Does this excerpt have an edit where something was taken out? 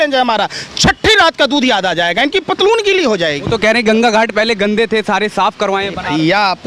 no; 0 cuts

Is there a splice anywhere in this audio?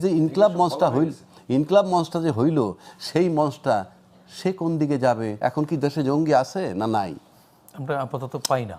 yes; 1 cut; at 5.3 s

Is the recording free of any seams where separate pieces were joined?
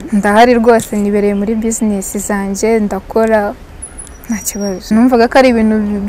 no; 1 cut; at 4.8 s

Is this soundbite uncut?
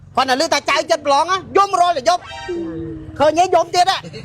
yes; 0 cuts

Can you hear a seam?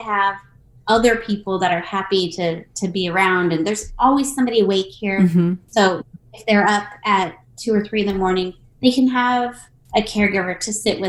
no; 0 cuts

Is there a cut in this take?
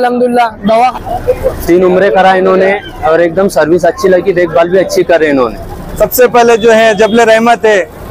yes; 2 cuts; at 0.9 s, 5.8 s

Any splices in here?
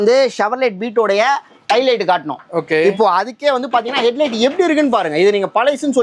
no; 0 cuts

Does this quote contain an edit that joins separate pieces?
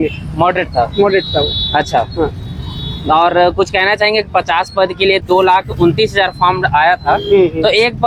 no; 0 cuts

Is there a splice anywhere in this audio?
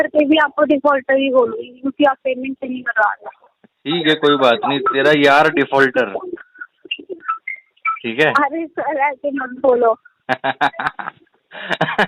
no; 0 cuts

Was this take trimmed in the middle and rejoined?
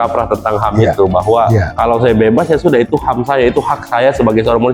no; 0 cuts

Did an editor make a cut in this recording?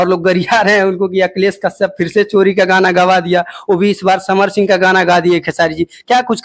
no; 0 cuts

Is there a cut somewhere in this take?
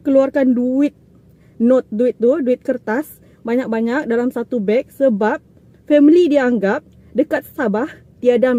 no; 0 cuts

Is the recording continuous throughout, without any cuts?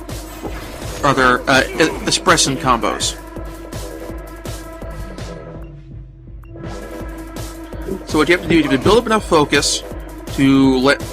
no; 1 cut; at 9.0 s

